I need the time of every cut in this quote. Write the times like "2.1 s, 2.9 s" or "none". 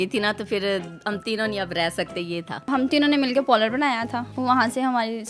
2.7 s, 4.2 s

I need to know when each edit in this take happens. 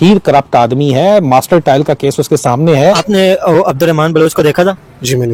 none

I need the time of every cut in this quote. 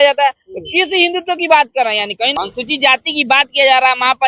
2.4 s

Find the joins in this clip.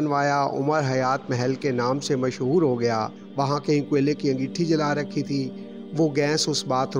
3.2 s

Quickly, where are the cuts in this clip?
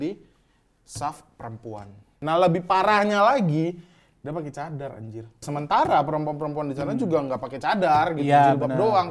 2.2 s, 5.4 s

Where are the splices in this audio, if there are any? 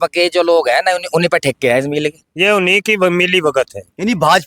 2.1 s

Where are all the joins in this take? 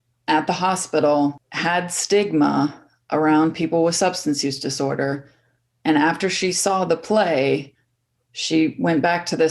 none

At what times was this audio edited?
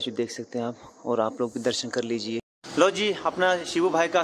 2.4 s

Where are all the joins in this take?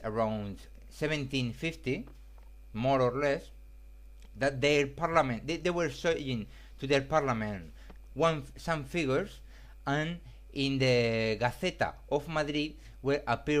12.3 s

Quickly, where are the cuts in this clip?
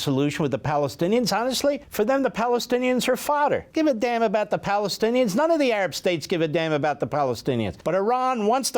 1.9 s, 3.7 s, 7.7 s

